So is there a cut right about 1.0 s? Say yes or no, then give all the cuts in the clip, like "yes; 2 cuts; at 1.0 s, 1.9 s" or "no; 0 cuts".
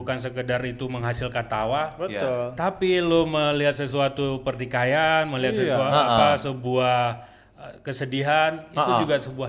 no; 0 cuts